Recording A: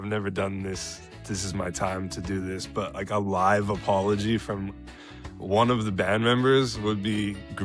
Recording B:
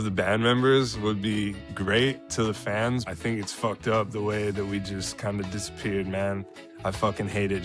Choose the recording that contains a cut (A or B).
B